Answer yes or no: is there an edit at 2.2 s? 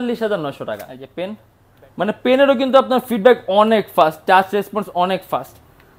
no